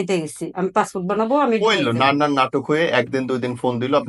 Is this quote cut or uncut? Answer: uncut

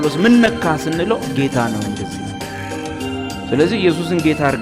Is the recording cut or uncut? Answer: uncut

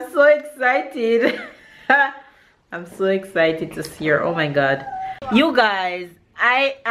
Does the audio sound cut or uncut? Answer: cut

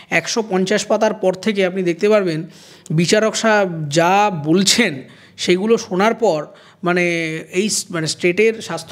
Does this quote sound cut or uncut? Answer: uncut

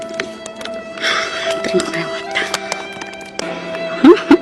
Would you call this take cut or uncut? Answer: cut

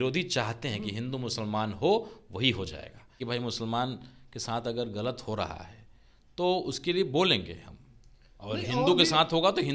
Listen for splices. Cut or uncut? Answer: cut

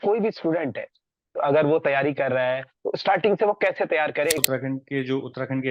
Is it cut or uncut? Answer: cut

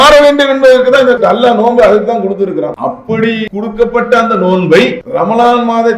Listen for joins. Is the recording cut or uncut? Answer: cut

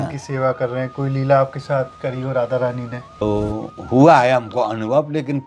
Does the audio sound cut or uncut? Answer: cut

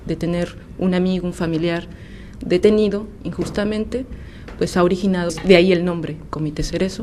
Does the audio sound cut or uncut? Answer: uncut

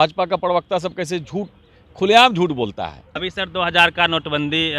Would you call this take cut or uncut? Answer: cut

